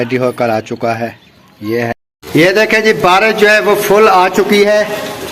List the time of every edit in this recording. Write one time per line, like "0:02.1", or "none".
0:02.0

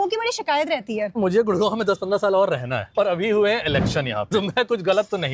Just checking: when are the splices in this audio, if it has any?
0:01.1
0:02.8
0:04.3

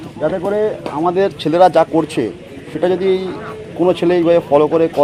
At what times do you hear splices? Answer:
none

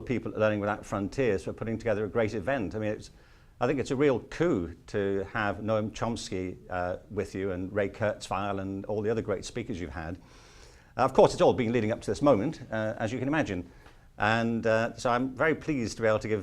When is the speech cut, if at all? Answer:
0:14.1

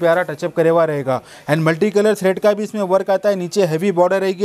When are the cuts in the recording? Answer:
none

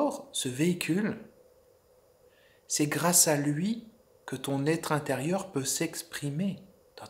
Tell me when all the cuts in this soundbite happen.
none

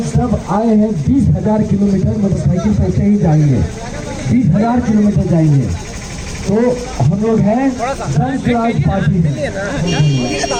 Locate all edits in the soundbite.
none

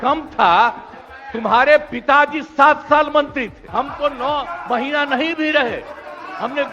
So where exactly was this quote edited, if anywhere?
0:03.6

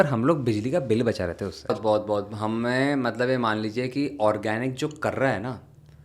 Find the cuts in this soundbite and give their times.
0:01.8

